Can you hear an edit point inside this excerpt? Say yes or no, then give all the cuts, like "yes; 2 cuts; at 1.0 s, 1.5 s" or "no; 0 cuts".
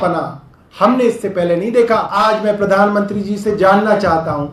yes; 1 cut; at 2.1 s